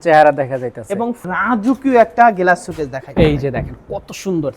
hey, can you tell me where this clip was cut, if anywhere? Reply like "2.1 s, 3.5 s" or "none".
1.2 s